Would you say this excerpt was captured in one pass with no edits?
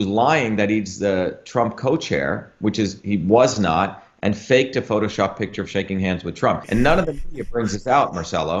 no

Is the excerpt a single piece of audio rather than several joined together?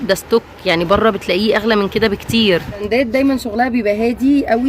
no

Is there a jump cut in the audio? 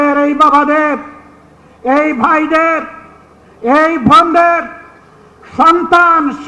no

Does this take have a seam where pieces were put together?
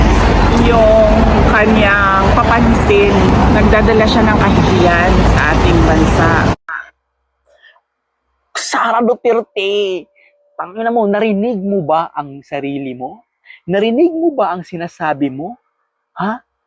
yes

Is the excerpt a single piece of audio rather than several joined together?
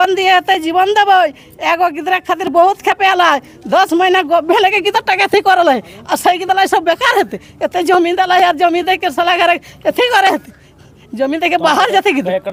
yes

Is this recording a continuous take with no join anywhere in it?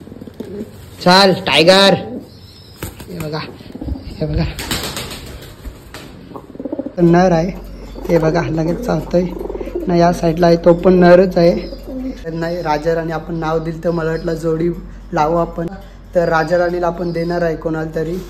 no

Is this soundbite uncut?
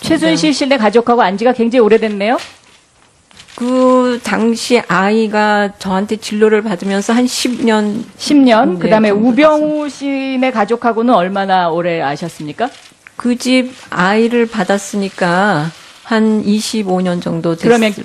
yes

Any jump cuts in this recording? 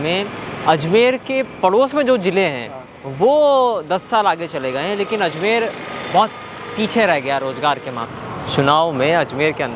yes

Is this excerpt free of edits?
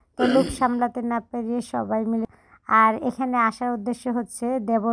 no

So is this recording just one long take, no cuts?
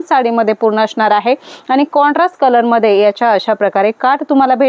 yes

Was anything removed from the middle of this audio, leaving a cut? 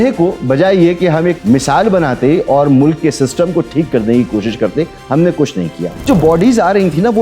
yes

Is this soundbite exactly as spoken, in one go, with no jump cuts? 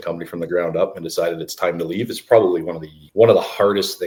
yes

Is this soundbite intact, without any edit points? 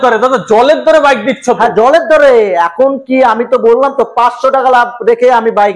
yes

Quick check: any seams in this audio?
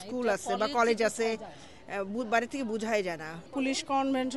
yes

